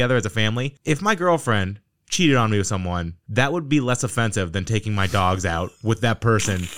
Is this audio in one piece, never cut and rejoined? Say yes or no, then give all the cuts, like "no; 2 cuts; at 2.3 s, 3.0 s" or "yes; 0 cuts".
yes; 0 cuts